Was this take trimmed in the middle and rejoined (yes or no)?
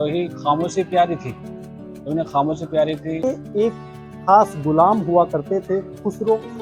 yes